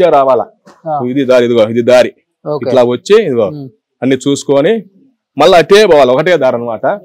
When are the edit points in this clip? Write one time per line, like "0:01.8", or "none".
none